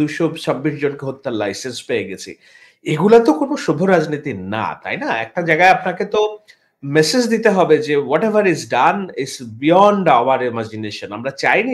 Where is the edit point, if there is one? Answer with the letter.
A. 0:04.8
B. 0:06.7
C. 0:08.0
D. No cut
D